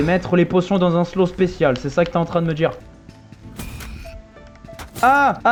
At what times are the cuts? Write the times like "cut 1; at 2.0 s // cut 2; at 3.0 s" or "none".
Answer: none